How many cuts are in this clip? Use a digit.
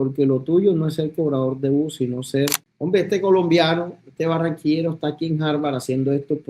1